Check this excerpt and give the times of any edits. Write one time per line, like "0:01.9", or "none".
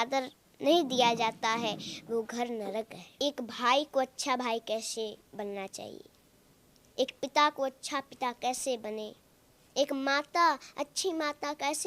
0:03.1